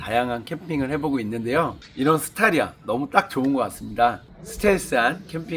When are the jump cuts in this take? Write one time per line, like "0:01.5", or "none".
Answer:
0:01.8
0:04.3